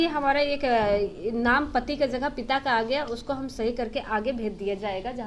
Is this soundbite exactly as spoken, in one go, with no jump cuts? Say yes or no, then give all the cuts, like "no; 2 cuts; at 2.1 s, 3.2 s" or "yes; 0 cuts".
yes; 0 cuts